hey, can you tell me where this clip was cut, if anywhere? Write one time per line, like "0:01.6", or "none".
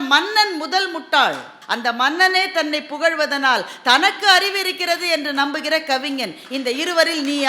0:01.6